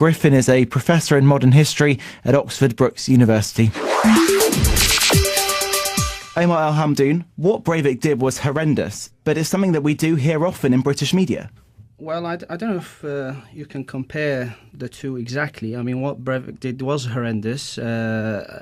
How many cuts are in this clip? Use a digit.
2